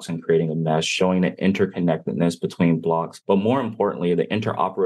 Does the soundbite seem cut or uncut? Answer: cut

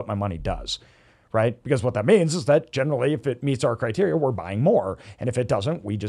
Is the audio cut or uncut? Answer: uncut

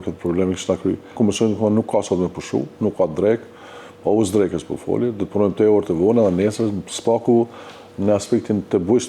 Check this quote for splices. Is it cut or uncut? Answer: cut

